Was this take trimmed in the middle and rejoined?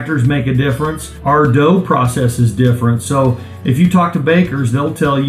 yes; 1 cut; at 1.1 s

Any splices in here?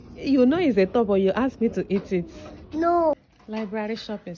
yes; 1 cut; at 3.2 s

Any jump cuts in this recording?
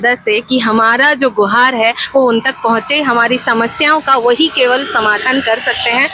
no; 0 cuts

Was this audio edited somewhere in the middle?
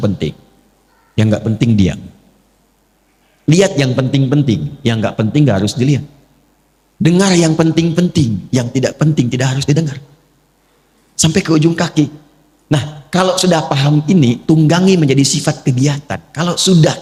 no; 0 cuts

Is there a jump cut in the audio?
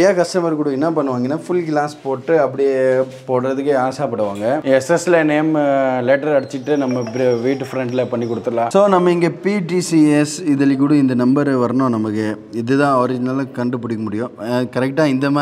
yes; 2 cuts; at 4.6 s, 8.7 s

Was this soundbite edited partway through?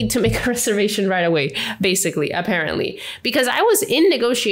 no; 0 cuts

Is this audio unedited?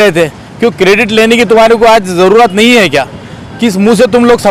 yes; 0 cuts

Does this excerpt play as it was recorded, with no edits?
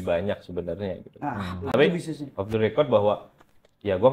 yes; 0 cuts

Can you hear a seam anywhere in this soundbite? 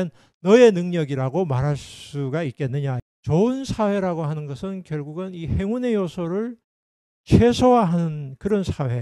yes; 1 cut; at 3.0 s

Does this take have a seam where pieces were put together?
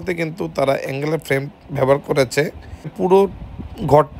yes; 1 cut; at 2.9 s

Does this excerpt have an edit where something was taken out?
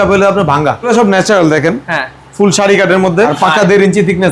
yes; 2 cuts; at 0.9 s, 3.3 s

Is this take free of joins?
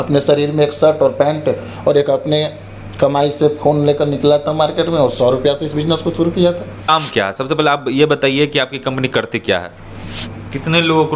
no; 2 cuts; at 6.9 s, 10.2 s

